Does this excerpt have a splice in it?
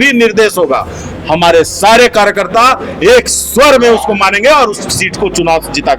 no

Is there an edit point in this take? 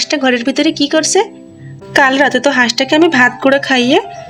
no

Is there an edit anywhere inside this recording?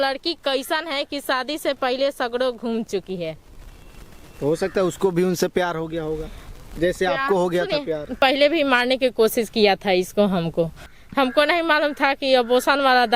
yes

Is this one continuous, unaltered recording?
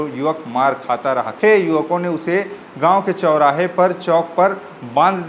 no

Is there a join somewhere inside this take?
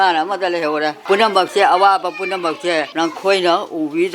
yes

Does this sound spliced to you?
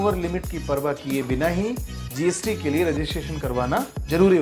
no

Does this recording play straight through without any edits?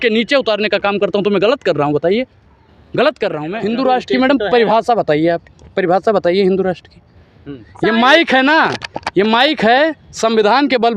no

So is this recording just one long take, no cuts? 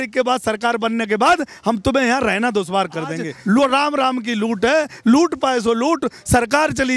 no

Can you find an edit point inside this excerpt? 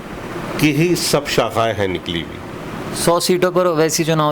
yes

